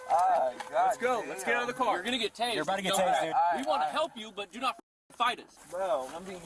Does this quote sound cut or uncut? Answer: cut